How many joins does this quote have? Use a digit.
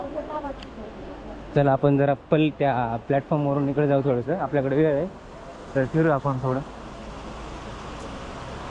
0